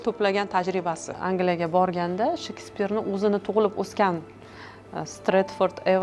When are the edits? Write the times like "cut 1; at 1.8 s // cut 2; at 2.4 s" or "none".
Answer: cut 1; at 1.1 s